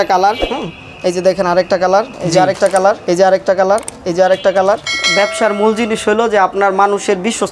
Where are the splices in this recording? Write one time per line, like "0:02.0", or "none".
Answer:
0:02.1
0:03.0
0:05.0